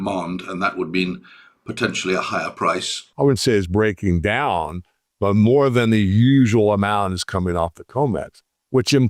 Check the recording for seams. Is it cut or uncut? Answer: cut